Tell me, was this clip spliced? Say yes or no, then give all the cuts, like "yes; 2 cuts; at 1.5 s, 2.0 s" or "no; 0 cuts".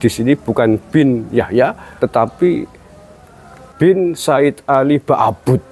yes; 2 cuts; at 1.8 s, 3.7 s